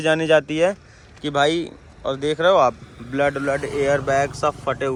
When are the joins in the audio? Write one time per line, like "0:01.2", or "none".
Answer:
none